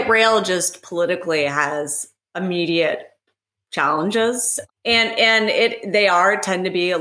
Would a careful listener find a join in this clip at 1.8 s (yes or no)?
no